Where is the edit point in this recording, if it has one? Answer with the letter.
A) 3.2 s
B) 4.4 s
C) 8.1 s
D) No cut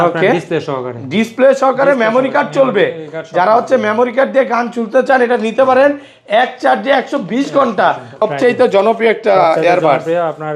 C